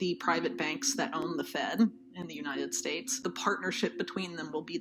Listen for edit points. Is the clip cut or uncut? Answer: cut